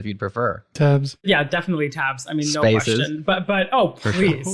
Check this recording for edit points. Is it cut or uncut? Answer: cut